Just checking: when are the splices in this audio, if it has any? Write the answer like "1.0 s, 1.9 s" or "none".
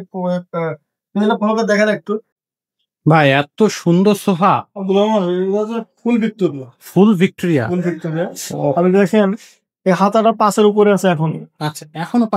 2.4 s

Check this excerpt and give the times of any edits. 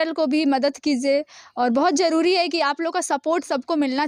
none

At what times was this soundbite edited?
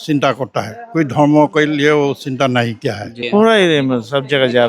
3.2 s

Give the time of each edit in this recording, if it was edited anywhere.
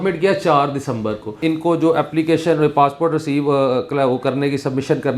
1.4 s

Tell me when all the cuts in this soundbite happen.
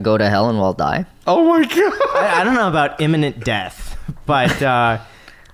none

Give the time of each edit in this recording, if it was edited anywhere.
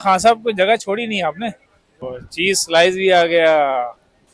2.1 s

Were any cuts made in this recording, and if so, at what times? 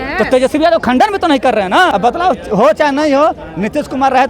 1.9 s

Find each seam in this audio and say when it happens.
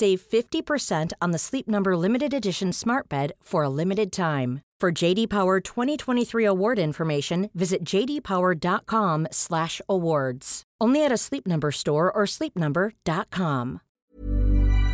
13.9 s

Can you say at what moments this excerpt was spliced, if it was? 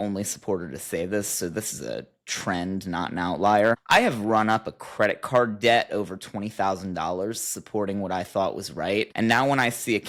none

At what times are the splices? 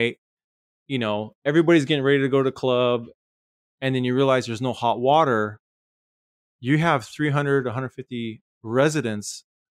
3.2 s

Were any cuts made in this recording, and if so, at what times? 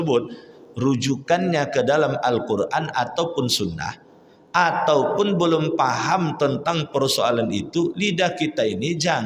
none

